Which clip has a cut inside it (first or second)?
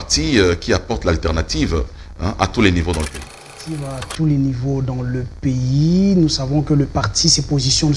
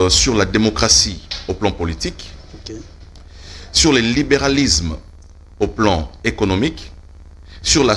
first